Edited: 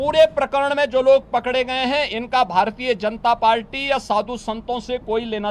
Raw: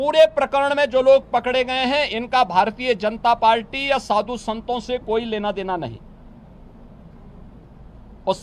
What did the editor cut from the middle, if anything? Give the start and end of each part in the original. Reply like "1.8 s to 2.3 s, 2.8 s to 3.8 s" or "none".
none